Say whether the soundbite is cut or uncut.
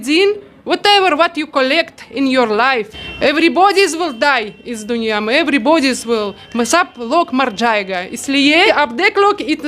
cut